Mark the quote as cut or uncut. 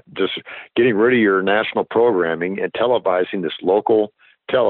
uncut